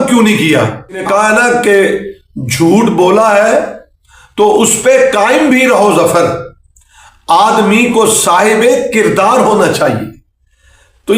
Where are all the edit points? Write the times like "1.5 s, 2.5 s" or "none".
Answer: 1.0 s